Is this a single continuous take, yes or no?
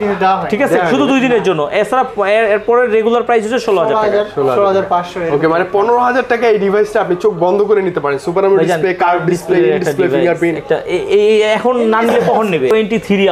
yes